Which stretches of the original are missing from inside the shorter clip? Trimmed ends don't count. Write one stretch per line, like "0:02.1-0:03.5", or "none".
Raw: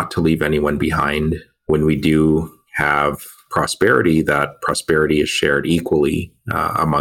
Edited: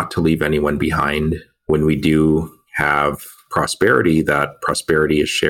none